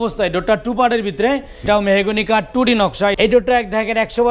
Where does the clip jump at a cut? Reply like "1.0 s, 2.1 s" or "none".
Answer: 1.6 s, 3.2 s